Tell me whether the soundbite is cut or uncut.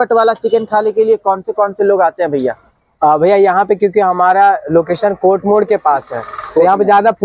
uncut